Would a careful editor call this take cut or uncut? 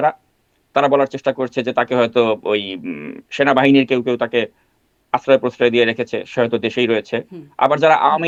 uncut